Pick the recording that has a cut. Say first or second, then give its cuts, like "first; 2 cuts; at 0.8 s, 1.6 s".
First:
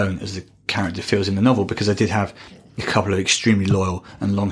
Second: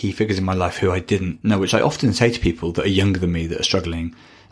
second; 1 cut; at 1.3 s